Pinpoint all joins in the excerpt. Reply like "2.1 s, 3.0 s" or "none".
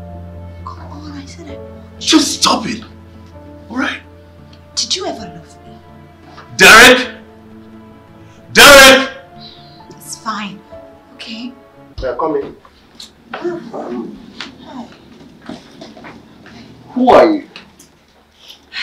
11.8 s